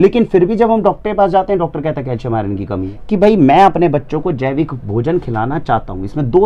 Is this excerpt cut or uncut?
cut